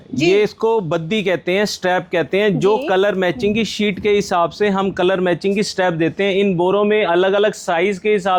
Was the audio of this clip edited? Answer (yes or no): no